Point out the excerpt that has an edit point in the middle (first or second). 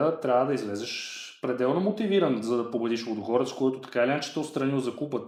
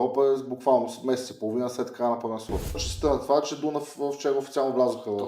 second